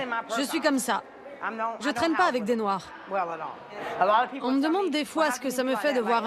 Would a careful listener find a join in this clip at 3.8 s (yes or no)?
yes